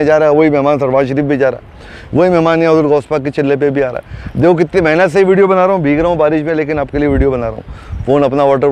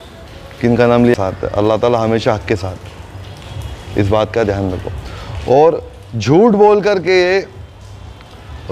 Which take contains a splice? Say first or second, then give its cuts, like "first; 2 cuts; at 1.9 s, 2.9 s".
second; 1 cut; at 1.1 s